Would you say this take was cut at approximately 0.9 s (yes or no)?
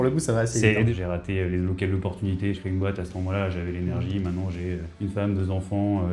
yes